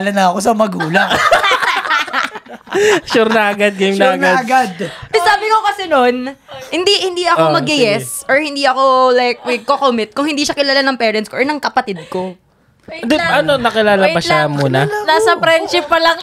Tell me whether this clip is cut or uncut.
uncut